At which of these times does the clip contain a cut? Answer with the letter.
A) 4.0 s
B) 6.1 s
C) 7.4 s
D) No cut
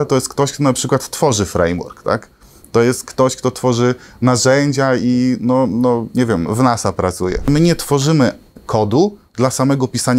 C